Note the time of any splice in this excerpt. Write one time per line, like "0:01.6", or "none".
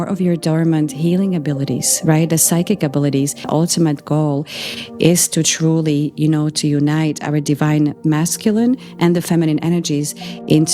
0:03.4